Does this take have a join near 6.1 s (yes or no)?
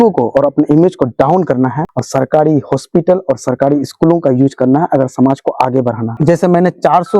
yes